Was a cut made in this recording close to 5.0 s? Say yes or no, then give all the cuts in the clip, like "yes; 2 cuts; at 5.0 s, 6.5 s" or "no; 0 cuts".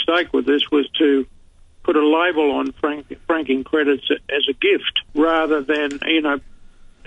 yes; 1 cut; at 5.0 s